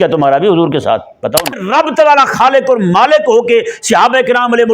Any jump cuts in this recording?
yes; 1 cut; at 1.6 s

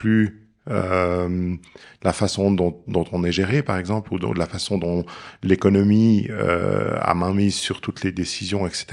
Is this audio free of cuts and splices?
yes; 0 cuts

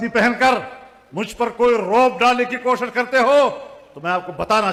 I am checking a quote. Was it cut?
no; 0 cuts

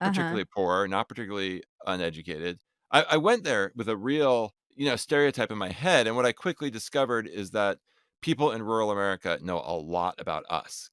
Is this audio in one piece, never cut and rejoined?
no; 1 cut; at 4.6 s

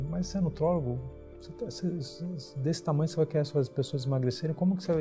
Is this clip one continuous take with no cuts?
yes; 0 cuts

